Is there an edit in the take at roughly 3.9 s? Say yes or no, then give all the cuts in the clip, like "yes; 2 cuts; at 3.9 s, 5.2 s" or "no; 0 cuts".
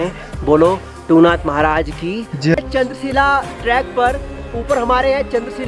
no; 1 cut; at 2.5 s